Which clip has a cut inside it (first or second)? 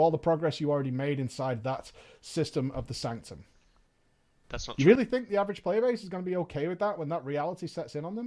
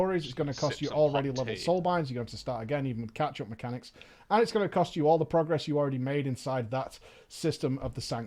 second